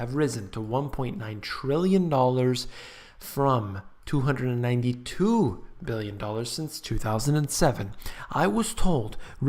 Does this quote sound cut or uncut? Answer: uncut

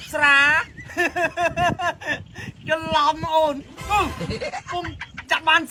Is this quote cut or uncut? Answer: uncut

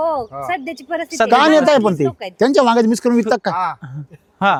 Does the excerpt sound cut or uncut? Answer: uncut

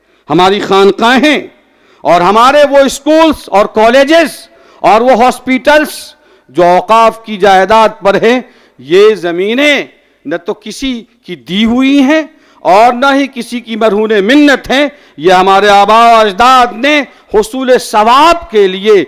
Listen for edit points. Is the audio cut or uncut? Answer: uncut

